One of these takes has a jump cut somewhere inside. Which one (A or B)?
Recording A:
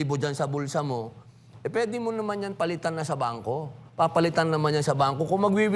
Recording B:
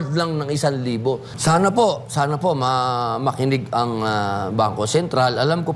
B